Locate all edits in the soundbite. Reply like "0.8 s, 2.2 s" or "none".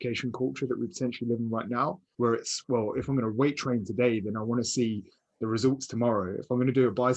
2.0 s